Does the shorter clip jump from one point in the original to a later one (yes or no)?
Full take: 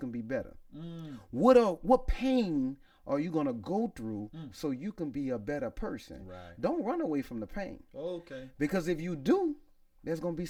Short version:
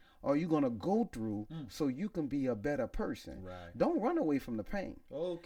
no